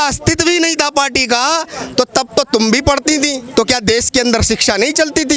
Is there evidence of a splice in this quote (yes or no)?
no